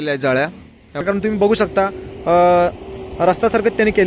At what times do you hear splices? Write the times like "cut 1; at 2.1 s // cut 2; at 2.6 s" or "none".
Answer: cut 1; at 1.0 s